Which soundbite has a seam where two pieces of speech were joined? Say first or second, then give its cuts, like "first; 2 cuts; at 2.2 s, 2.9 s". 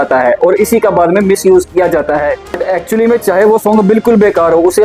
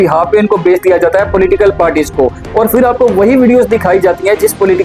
first; 1 cut; at 2.5 s